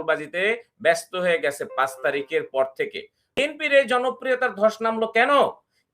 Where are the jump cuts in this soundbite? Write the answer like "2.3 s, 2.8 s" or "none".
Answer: 3.4 s